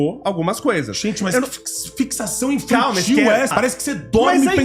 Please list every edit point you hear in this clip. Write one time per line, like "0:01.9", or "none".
0:03.5